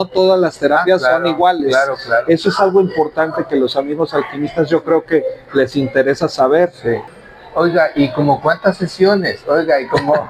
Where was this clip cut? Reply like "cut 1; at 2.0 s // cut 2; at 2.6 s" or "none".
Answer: cut 1; at 7.1 s